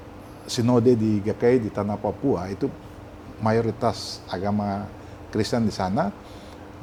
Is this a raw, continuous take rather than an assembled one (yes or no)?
yes